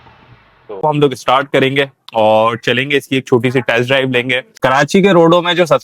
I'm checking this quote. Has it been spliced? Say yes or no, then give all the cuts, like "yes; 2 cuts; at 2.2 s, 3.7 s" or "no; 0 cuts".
yes; 2 cuts; at 0.8 s, 4.6 s